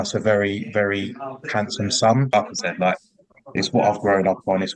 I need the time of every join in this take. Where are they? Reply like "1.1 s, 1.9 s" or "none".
2.4 s